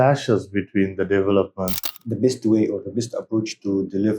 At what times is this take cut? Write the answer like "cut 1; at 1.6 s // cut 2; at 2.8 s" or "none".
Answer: cut 1; at 1.7 s